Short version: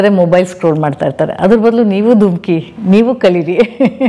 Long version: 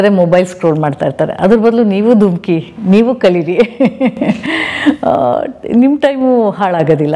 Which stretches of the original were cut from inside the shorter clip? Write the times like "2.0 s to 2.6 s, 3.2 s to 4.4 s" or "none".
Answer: none